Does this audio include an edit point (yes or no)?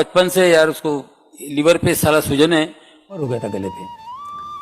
yes